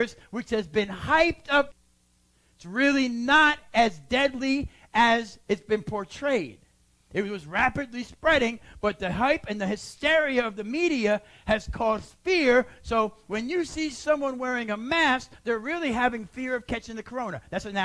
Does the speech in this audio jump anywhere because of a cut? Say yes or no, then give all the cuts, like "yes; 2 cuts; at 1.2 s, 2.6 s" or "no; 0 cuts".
no; 0 cuts